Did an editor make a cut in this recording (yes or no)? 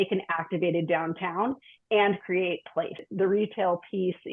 yes